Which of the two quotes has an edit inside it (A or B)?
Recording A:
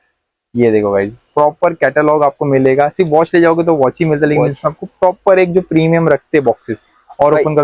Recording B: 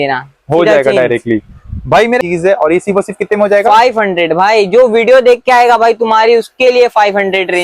B